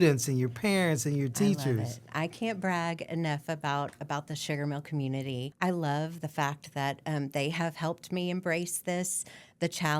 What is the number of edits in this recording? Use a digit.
1